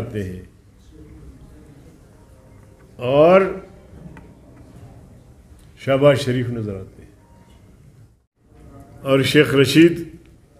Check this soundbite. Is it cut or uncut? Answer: cut